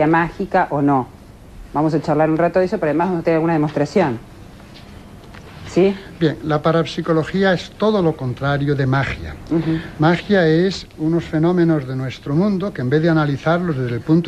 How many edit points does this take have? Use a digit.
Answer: 0